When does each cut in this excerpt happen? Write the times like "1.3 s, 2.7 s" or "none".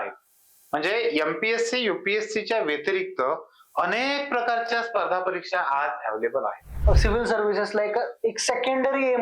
6.8 s